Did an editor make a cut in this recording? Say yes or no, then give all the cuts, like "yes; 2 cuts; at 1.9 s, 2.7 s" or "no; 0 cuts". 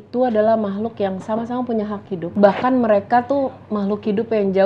yes; 1 cut; at 2.3 s